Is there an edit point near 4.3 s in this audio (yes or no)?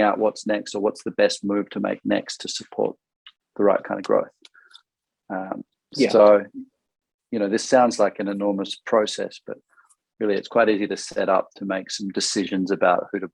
no